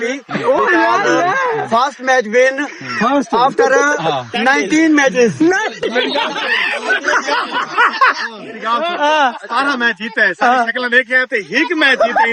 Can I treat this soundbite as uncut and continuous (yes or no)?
yes